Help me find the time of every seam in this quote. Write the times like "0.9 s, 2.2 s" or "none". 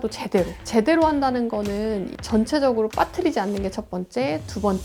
none